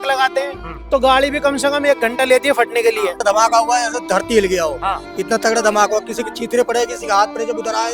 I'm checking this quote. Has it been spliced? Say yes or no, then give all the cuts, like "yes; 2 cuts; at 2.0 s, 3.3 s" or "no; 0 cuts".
yes; 1 cut; at 3.2 s